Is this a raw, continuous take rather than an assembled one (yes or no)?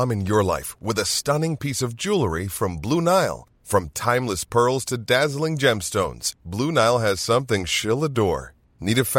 yes